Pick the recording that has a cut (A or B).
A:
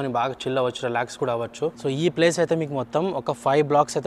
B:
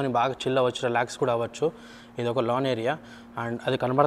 A